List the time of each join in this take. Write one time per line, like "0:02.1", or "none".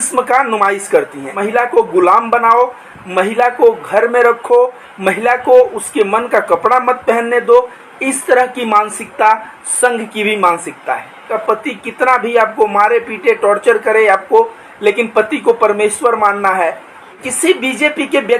0:01.4
0:11.4
0:17.2